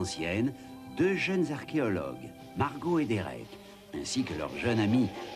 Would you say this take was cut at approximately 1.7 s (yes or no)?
yes